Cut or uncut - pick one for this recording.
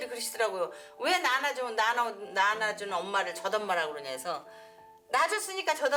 uncut